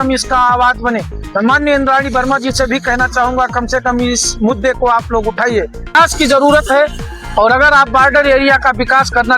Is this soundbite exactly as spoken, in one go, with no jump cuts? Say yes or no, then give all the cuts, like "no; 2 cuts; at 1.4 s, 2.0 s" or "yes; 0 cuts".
no; 1 cut; at 6.0 s